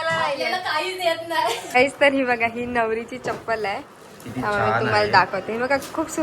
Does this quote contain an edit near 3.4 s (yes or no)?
no